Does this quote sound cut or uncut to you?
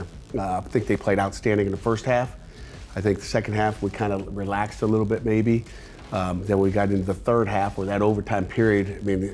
uncut